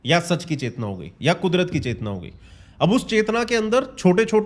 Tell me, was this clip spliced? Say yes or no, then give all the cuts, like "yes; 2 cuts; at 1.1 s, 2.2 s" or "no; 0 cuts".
no; 0 cuts